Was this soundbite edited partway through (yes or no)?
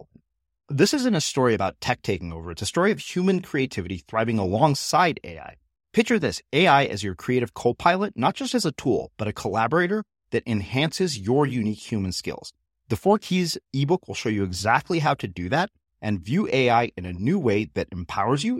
no